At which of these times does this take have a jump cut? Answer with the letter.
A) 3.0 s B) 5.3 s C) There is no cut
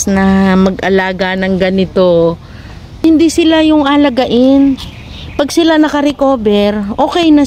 A